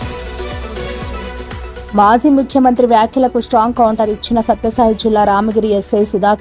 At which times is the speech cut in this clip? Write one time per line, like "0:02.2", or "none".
0:01.1